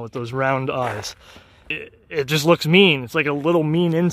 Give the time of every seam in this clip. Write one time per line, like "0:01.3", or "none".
0:01.7